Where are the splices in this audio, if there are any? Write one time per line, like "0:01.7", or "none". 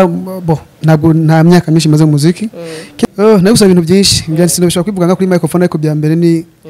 0:03.0